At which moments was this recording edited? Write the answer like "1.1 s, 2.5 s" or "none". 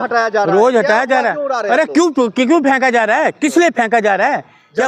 none